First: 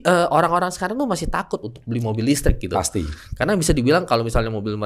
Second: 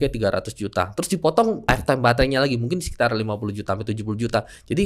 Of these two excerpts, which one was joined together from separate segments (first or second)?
second